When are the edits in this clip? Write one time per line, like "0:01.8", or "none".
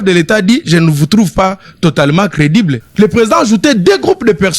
0:02.8

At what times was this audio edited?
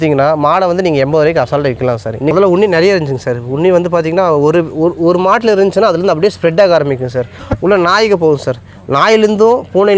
0:02.3
0:07.4

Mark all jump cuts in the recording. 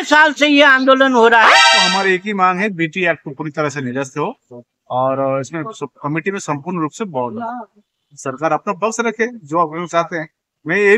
0:01.5

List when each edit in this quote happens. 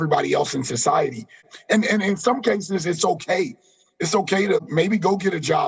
0:01.5
0:04.6

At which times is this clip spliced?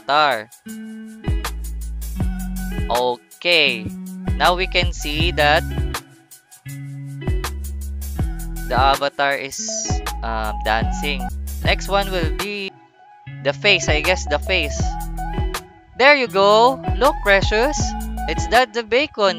0:11.3
0:12.7

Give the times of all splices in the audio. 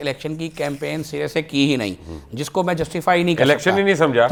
none

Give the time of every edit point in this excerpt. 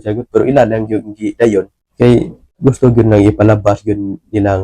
0:01.8
0:02.4

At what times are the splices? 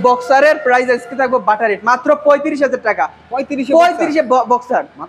none

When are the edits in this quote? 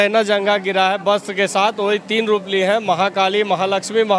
none

